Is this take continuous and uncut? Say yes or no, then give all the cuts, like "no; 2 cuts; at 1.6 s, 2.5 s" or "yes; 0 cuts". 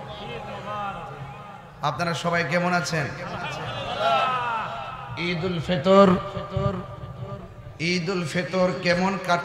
yes; 0 cuts